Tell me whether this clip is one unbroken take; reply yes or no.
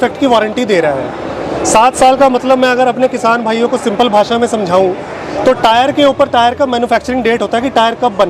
yes